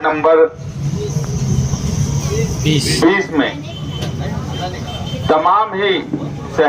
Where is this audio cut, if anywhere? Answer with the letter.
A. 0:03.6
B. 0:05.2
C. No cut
C